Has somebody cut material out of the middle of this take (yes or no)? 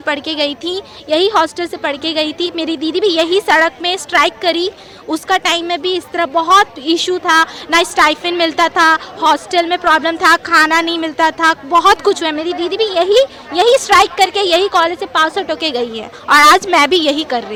no